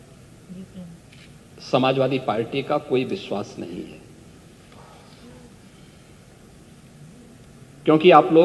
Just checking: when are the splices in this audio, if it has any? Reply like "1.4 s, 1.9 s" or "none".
none